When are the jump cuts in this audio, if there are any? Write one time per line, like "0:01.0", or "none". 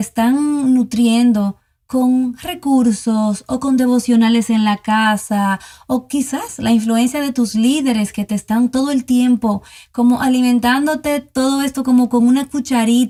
none